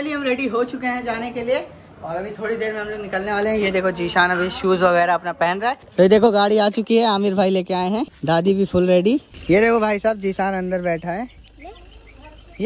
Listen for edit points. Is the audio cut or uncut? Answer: cut